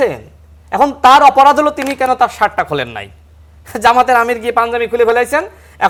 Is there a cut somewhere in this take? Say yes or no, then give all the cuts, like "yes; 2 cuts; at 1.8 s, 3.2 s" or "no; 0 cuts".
no; 0 cuts